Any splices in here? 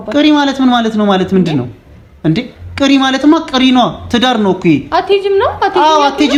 no; 0 cuts

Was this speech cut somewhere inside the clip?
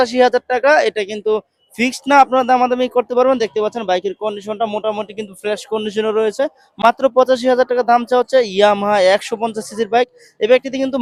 no; 0 cuts

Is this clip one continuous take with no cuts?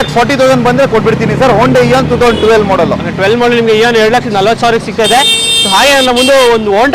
yes; 0 cuts

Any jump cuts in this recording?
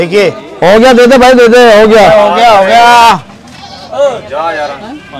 no; 0 cuts

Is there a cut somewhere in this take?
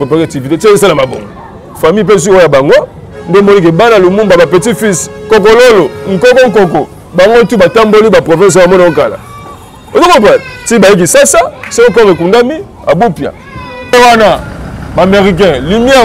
yes; 1 cut; at 13.9 s

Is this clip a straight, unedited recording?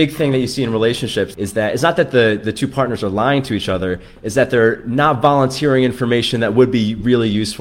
no; 1 cut; at 1.3 s

